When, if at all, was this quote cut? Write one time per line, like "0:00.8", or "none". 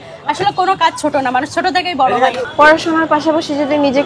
0:02.4